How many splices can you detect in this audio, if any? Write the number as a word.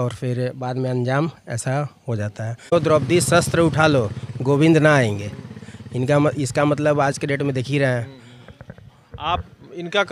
one